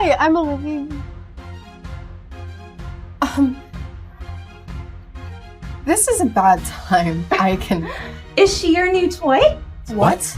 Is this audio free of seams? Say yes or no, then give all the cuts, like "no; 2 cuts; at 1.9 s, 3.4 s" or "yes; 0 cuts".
no; 2 cuts; at 1.4 s, 3.0 s